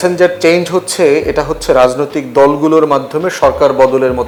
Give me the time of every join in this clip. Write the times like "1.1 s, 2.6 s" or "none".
none